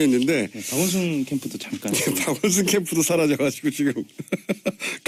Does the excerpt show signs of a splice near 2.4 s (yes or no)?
no